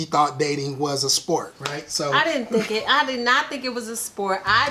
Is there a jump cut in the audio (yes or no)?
no